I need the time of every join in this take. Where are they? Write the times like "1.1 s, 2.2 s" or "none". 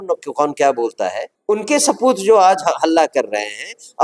1.3 s

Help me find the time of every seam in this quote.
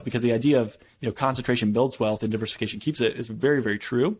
none

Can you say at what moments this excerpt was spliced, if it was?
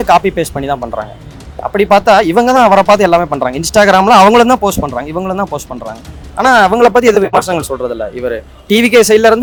none

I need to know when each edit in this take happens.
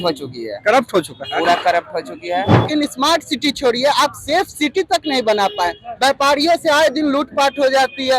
2.7 s

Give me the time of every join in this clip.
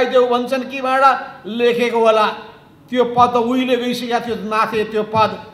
none

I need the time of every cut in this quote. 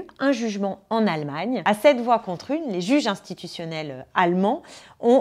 1.6 s

